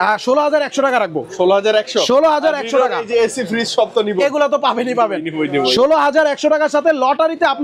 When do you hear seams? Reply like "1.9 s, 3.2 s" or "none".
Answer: none

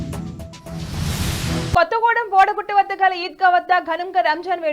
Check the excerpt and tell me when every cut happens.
1.8 s

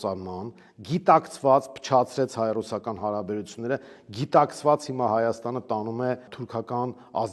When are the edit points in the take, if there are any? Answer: 6.4 s

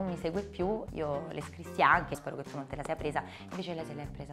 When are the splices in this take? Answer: 0.9 s, 2.2 s

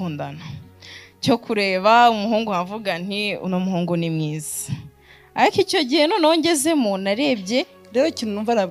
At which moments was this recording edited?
7.8 s

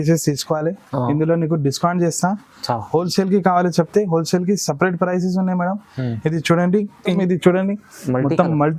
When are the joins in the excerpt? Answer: 7.2 s

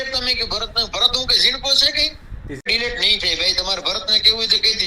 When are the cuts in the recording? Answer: 2.6 s

